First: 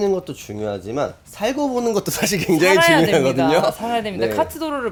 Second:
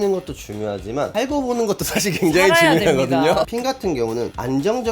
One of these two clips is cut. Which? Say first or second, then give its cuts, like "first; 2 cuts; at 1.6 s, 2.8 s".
second; 2 cuts; at 1.1 s, 3.5 s